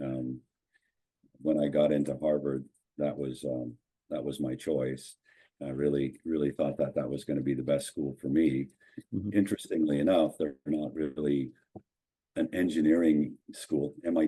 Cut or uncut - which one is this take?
uncut